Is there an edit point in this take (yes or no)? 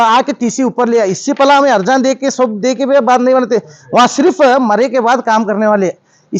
no